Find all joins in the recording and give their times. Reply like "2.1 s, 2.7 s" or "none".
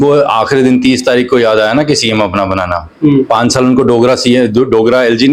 none